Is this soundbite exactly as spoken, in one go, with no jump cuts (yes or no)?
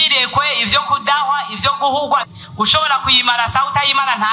no